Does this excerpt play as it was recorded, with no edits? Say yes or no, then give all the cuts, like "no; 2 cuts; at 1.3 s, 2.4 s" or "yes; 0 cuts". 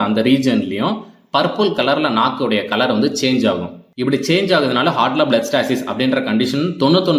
yes; 0 cuts